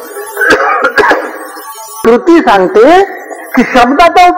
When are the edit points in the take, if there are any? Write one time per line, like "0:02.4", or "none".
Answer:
0:02.0